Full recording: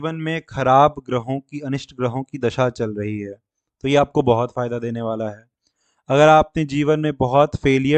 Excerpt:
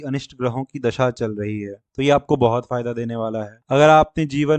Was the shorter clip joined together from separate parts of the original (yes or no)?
yes